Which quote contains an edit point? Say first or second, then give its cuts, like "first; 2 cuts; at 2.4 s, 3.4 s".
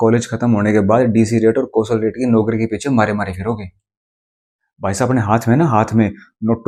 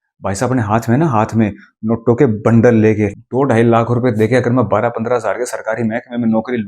second; 1 cut; at 3.1 s